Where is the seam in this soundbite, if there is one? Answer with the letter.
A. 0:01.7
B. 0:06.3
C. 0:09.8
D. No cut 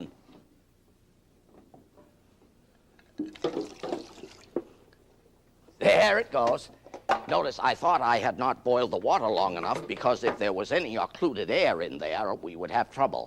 C